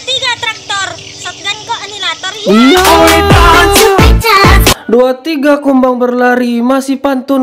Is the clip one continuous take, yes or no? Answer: yes